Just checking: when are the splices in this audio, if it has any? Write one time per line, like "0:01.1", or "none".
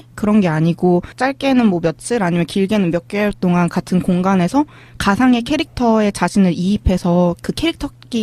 none